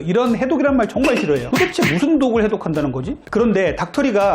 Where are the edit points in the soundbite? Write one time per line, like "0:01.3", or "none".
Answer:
0:01.5
0:03.2